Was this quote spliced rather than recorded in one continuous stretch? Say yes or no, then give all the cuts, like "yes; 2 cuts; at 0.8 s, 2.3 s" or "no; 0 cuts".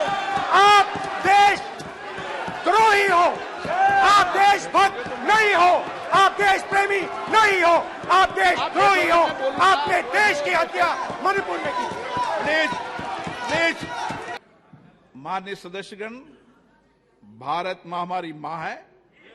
yes; 1 cut; at 14.3 s